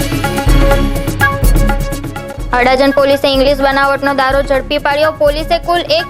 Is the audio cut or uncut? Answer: uncut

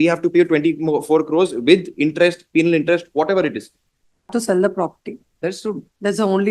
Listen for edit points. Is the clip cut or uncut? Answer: cut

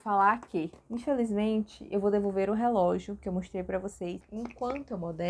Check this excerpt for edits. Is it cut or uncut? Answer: cut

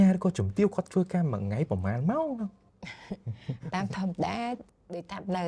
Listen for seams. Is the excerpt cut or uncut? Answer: uncut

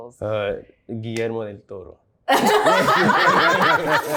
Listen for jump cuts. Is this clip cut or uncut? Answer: uncut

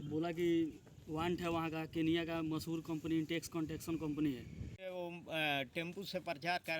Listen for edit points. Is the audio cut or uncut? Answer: cut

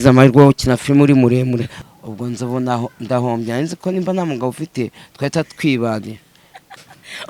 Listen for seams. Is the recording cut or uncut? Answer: cut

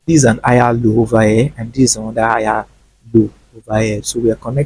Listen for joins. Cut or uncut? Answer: uncut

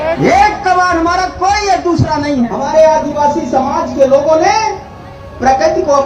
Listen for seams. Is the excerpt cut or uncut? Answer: cut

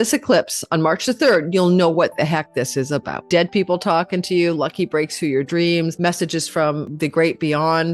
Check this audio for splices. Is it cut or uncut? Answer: cut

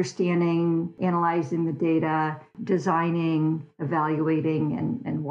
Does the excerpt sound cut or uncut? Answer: cut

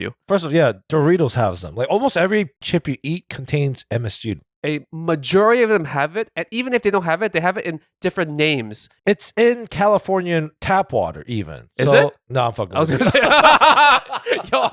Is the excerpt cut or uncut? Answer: cut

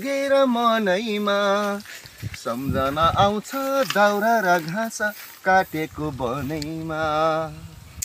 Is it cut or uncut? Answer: uncut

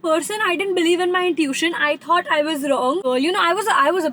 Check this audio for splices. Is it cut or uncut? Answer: cut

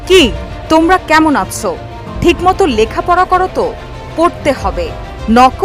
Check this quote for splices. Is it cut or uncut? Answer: uncut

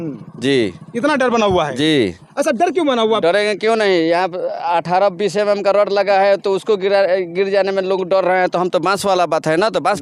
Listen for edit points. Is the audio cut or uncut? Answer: cut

